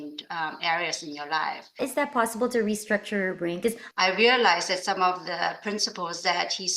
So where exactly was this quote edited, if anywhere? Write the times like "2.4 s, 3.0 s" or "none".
1.8 s, 3.8 s